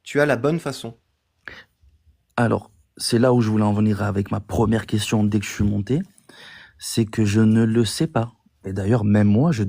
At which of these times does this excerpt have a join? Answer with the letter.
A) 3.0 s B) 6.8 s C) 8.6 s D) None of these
C